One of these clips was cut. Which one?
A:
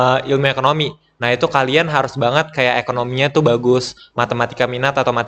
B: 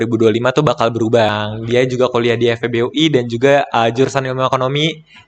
B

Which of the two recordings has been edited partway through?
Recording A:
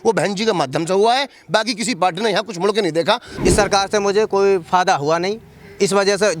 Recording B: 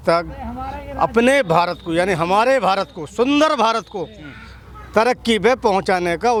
A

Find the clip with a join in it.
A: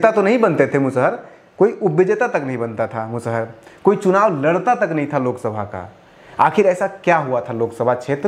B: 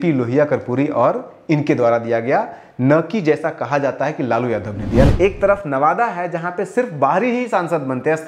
B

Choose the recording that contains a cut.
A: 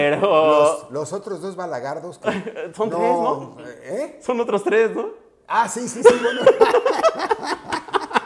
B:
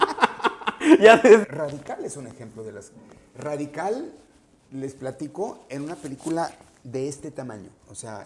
B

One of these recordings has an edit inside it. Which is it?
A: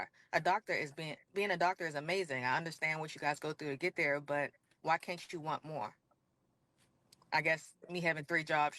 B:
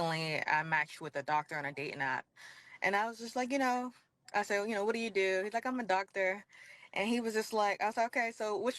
A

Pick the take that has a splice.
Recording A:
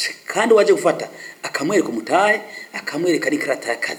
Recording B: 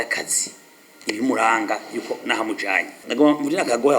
B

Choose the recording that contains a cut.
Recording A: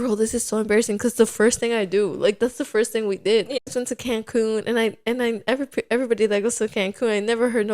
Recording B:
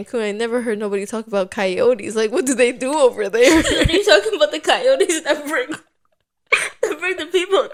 A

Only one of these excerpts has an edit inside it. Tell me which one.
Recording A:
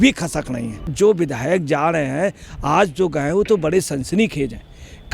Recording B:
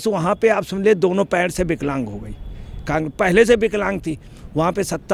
A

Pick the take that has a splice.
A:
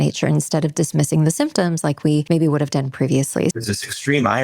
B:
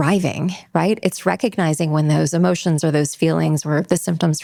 A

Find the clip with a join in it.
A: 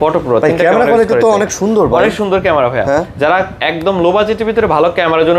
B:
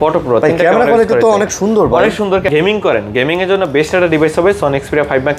B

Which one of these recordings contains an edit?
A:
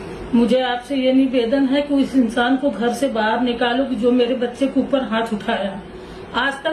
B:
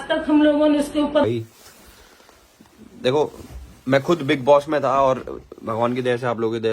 B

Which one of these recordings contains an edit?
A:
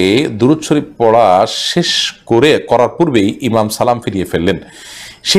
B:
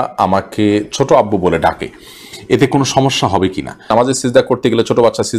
B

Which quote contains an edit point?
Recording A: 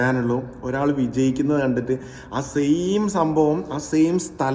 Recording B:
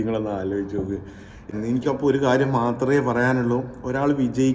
B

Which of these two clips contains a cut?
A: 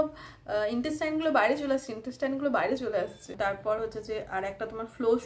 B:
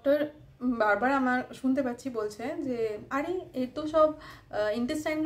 A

